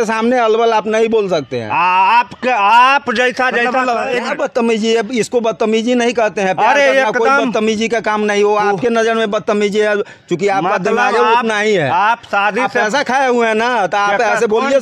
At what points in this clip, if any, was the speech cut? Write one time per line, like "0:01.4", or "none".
0:04.2